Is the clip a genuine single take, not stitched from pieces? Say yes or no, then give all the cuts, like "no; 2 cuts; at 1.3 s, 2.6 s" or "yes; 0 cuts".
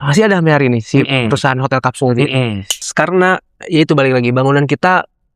no; 1 cut; at 2.8 s